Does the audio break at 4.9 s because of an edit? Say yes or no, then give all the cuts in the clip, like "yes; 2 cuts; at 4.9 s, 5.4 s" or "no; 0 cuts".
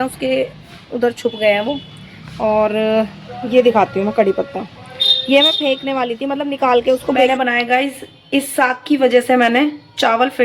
no; 1 cut; at 7.3 s